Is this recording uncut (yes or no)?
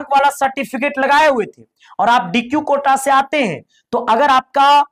yes